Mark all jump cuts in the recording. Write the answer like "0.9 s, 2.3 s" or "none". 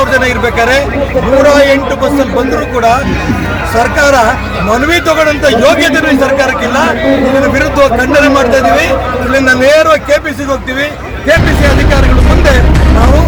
none